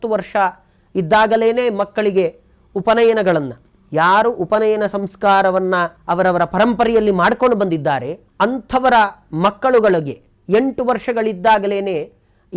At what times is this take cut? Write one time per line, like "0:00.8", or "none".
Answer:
0:06.0
0:08.2